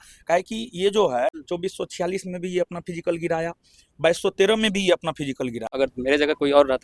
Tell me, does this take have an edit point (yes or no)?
yes